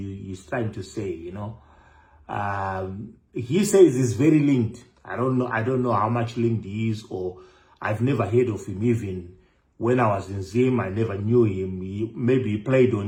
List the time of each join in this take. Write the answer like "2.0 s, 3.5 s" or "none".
none